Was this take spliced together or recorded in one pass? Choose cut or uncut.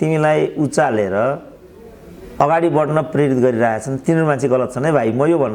uncut